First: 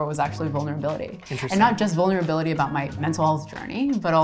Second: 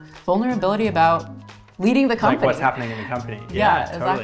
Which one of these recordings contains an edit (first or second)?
first